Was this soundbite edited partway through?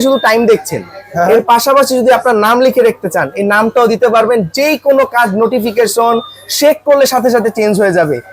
no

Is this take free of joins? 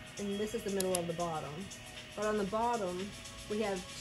yes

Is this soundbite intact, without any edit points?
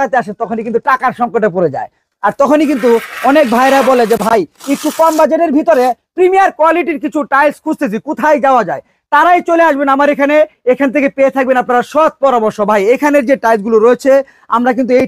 yes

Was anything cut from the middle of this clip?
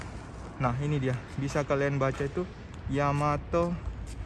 no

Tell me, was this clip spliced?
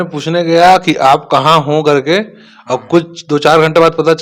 no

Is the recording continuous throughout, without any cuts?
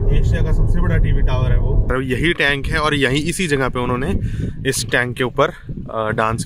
no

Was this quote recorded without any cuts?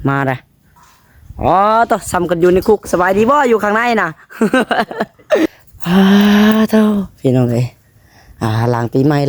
no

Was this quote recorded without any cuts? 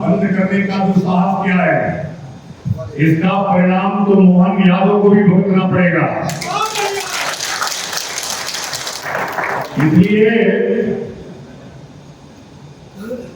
yes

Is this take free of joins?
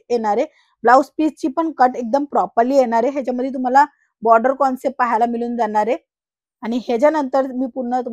yes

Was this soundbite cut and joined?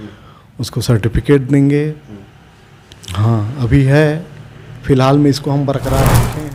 no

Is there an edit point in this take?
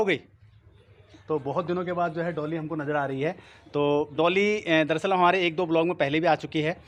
no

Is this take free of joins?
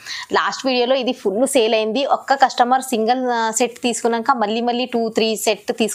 yes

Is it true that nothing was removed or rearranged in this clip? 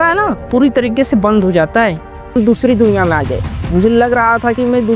no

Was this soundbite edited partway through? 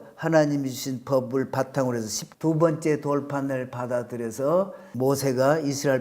yes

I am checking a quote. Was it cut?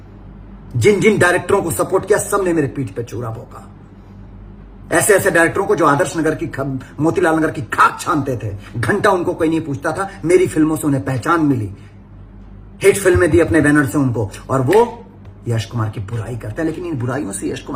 no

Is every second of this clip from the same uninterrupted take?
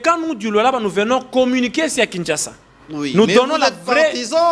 yes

